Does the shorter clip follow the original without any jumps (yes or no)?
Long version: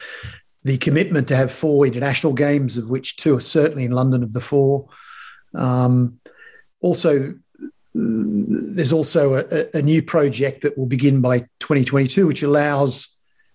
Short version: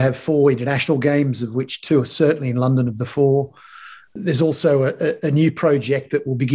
no